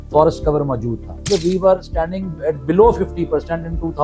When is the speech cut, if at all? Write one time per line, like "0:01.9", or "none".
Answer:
0:01.3